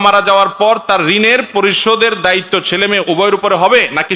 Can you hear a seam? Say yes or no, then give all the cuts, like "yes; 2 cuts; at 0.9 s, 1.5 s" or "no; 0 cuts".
no; 0 cuts